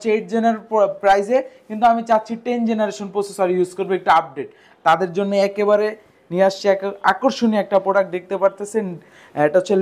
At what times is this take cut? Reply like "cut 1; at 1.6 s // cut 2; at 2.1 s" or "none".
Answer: none